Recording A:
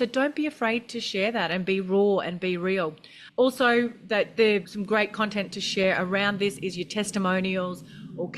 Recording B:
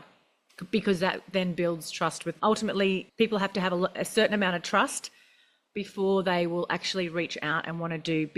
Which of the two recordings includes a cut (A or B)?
A